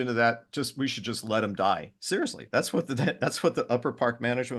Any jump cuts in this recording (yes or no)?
no